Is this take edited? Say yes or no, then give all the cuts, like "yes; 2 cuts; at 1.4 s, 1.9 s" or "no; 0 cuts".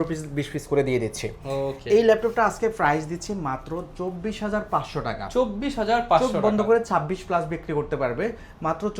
no; 0 cuts